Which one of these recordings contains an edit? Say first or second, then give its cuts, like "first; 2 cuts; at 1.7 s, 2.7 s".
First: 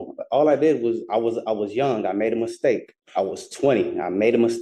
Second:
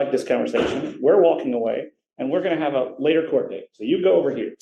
first; 1 cut; at 3.0 s